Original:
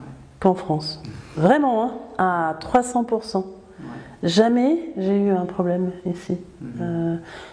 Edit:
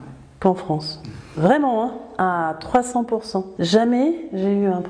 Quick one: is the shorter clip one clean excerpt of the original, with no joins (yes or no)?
no